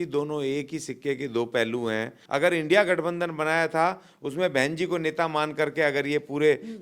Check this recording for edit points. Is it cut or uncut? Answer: cut